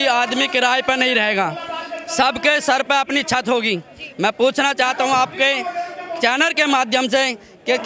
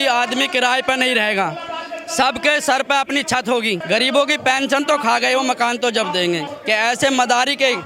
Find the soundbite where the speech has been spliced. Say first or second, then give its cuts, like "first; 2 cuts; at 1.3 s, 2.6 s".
second; 2 cuts; at 3.8 s, 6.5 s